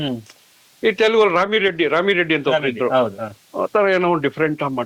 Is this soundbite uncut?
yes; 0 cuts

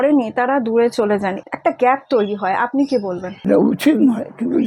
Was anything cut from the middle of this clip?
yes; 2 cuts; at 1.4 s, 3.5 s

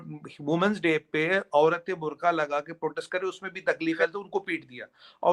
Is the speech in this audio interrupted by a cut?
no; 0 cuts

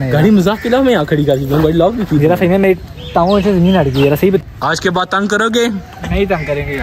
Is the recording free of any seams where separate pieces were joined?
no; 1 cut; at 4.4 s

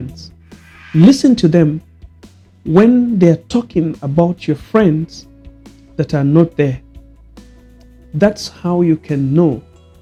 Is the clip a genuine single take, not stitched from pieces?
yes; 0 cuts

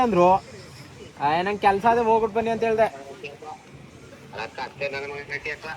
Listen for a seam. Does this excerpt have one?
no; 0 cuts

